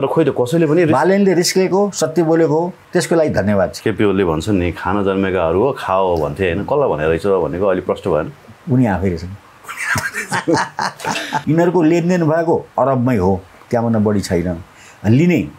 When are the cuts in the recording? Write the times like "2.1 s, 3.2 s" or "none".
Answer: 2.8 s, 3.8 s, 11.4 s